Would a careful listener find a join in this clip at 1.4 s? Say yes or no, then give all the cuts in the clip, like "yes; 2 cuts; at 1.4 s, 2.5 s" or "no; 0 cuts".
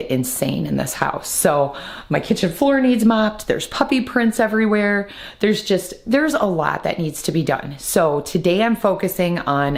no; 0 cuts